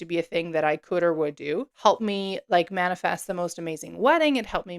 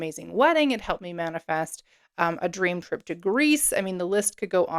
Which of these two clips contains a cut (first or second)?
first